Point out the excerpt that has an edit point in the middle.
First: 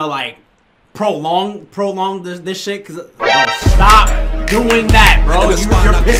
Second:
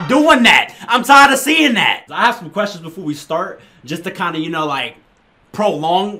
second; 1 cut; at 2.1 s

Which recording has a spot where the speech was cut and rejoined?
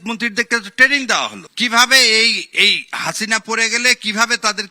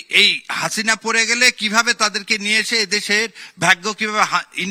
first; 1 cut; at 1.4 s

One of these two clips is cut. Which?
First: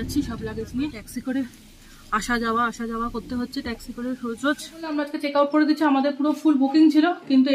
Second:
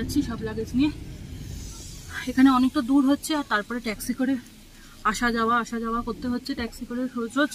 first; 2 cuts; at 1.0 s, 5.1 s

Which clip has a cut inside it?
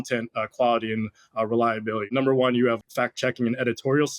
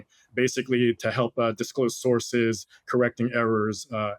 first; 2 cuts; at 2.1 s, 2.8 s

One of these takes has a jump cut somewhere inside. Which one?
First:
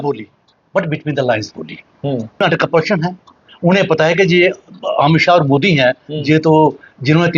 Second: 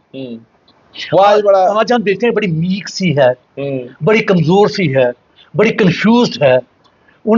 first; 1 cut; at 2.4 s

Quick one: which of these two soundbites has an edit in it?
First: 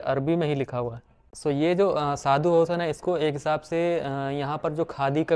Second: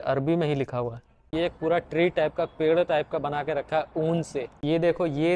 second; 2 cuts; at 1.3 s, 4.6 s

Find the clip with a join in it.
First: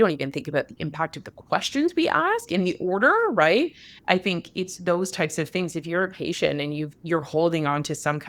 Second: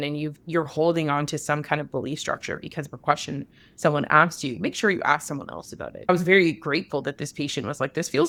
first; 1 cut; at 3.9 s

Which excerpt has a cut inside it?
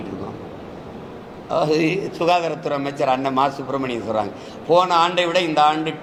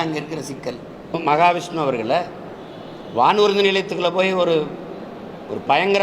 second; 1 cut; at 1.2 s

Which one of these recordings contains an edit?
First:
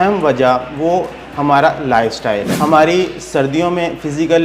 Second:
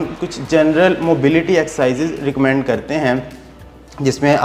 first; 1 cut; at 2.5 s

